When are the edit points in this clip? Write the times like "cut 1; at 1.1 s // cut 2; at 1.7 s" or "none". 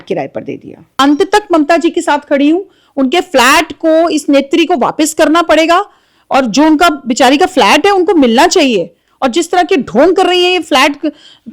cut 1; at 0.9 s